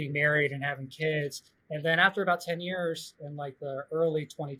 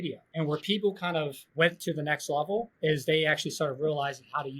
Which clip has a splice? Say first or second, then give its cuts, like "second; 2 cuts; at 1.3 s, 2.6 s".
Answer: second; 1 cut; at 1.5 s